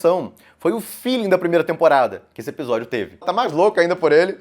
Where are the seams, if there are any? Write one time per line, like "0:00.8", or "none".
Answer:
0:03.3